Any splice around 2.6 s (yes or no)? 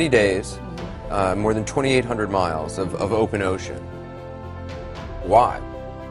no